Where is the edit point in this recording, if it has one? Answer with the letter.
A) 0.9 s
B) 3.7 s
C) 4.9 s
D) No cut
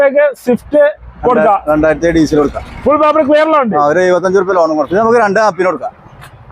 C